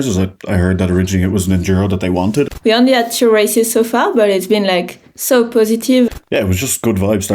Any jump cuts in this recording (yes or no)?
yes